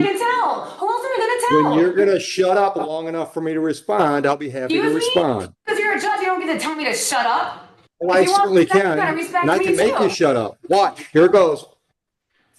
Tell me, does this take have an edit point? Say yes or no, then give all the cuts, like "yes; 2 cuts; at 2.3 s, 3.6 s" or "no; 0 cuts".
no; 0 cuts